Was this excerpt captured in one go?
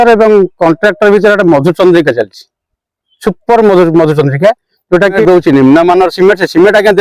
no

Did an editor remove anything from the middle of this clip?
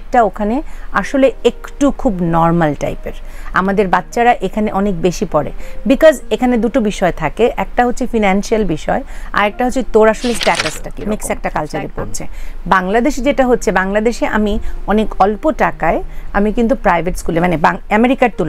yes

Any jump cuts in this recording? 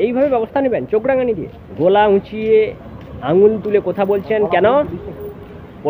yes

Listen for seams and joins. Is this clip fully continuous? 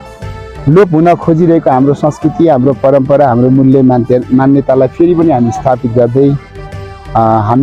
yes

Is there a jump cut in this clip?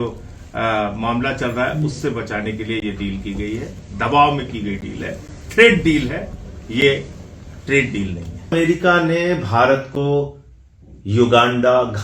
yes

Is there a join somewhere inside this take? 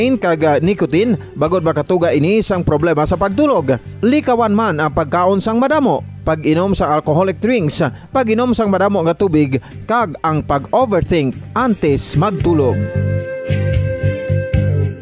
no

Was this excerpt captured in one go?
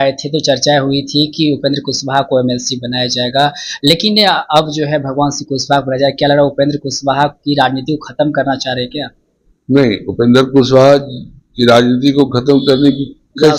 yes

